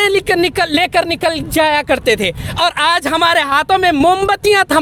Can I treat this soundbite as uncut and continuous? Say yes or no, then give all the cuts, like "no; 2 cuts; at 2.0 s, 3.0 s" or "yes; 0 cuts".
yes; 0 cuts